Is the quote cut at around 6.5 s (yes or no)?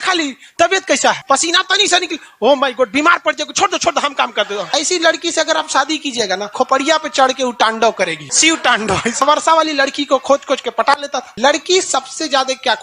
yes